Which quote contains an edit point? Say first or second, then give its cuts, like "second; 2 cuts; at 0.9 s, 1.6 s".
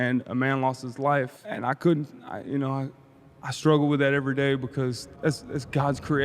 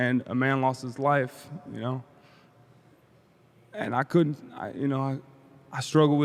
first; 2 cuts; at 1.4 s, 5.1 s